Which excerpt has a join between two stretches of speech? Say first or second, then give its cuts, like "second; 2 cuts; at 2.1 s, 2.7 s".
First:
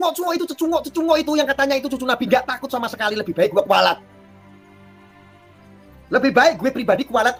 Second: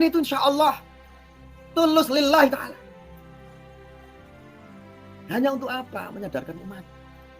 second; 2 cuts; at 2.8 s, 5.3 s